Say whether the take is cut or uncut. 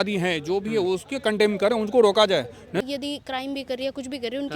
cut